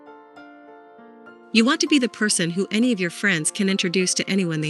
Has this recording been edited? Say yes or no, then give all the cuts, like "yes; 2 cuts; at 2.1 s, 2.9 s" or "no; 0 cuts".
yes; 1 cut; at 1.5 s